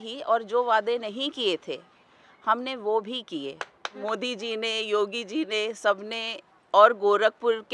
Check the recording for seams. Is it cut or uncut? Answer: cut